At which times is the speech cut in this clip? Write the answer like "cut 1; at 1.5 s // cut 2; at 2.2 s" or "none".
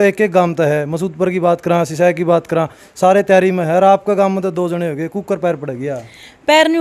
none